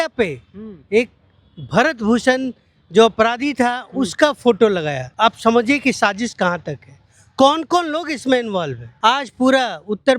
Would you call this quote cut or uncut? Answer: cut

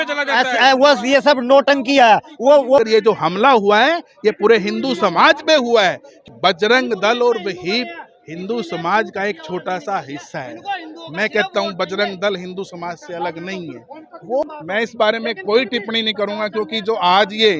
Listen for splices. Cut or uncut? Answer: cut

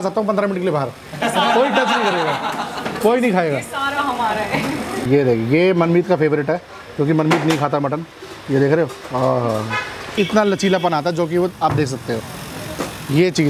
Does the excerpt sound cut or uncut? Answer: cut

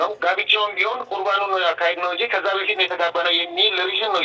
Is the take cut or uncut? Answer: uncut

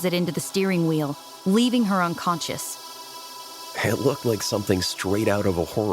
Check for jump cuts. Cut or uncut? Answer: cut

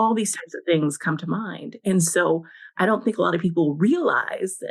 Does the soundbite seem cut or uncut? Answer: uncut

